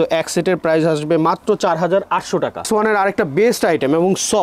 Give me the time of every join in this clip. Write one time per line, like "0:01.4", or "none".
0:02.7